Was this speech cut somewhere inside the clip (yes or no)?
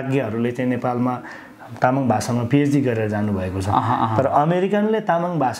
no